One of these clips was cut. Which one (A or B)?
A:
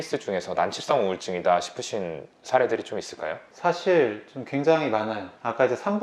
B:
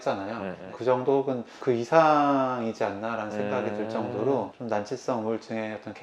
B